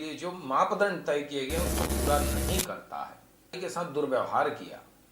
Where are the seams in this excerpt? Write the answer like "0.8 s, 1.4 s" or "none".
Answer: 3.6 s

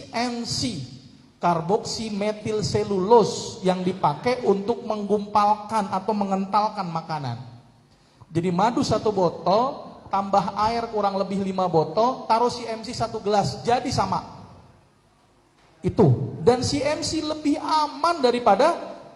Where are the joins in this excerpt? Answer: none

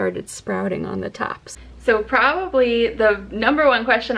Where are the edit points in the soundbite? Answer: 1.4 s

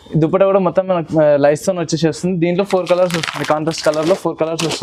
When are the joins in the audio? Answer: none

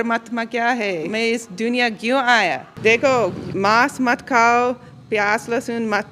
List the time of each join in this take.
1.1 s, 2.7 s, 3.4 s

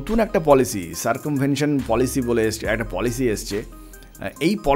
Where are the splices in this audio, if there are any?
none

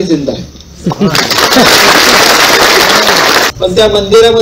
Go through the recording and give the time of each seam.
3.5 s

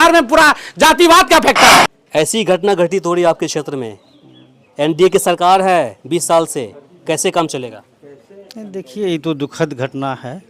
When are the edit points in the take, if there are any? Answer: 1.7 s

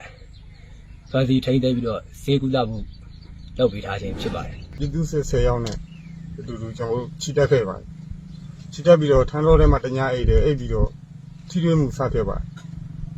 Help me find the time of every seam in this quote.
4.8 s

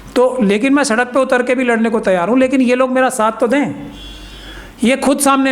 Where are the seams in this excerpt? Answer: none

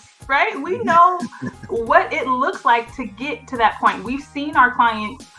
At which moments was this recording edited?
none

